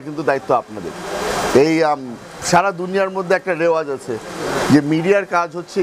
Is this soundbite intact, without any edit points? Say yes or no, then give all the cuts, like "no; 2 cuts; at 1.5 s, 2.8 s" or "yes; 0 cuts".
yes; 0 cuts